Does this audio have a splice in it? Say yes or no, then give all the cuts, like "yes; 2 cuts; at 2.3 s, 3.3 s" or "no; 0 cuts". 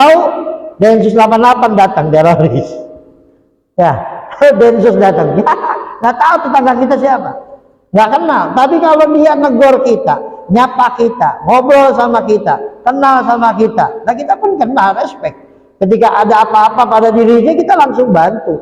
no; 0 cuts